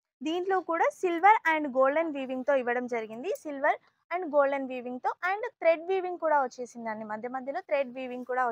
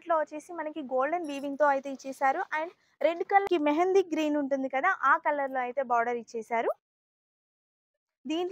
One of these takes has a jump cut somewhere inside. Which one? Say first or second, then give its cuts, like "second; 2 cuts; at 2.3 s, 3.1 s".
second; 1 cut; at 3.4 s